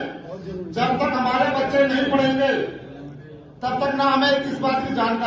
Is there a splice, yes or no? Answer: no